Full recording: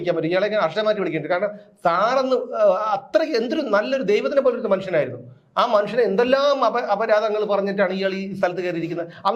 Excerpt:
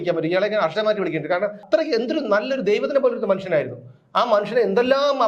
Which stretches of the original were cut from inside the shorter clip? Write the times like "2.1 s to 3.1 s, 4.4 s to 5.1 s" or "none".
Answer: 1.6 s to 3.0 s